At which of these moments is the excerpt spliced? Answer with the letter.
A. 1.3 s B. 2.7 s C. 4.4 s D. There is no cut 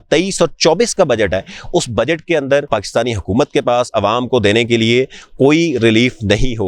B